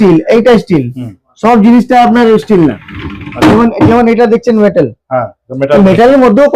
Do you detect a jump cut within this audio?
no; 0 cuts

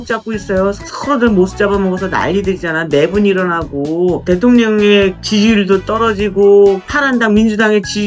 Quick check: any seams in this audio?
yes; 4 cuts; at 0.9 s, 4.2 s, 5.2 s, 6.9 s

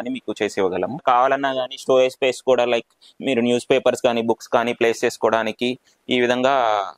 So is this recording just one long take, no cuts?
no; 1 cut; at 1.0 s

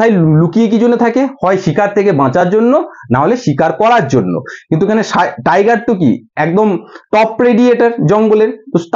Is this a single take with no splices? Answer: yes; 0 cuts

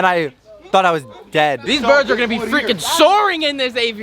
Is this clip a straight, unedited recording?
no; 1 cut; at 1.6 s

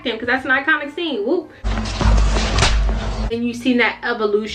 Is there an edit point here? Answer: yes; 2 cuts; at 1.6 s, 3.3 s

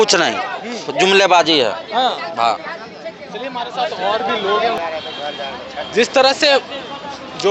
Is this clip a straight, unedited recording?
yes; 0 cuts

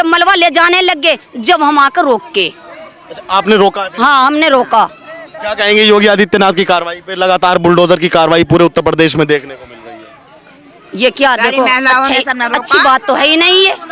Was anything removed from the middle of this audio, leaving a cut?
no; 0 cuts

